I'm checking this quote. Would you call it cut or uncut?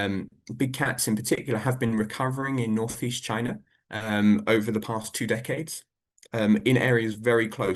uncut